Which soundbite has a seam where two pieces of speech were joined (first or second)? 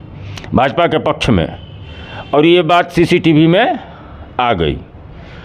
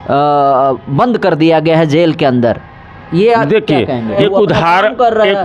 second